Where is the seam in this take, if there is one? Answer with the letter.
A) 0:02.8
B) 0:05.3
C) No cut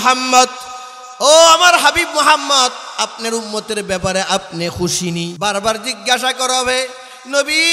B